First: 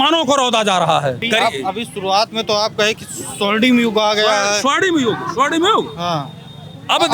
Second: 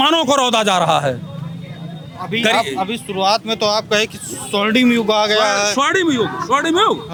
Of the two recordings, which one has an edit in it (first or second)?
first